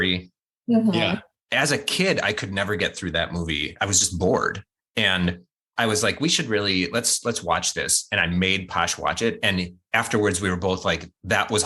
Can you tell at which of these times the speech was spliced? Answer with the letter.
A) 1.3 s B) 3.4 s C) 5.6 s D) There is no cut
A